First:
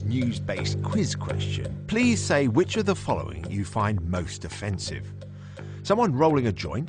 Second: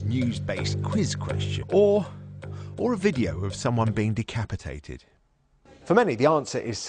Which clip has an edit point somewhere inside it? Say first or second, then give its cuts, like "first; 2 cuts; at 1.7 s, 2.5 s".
first; 1 cut; at 1.6 s